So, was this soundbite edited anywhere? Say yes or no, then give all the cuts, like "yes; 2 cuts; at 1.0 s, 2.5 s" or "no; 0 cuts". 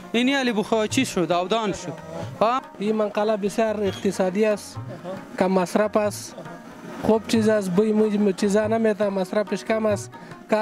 yes; 1 cut; at 2.6 s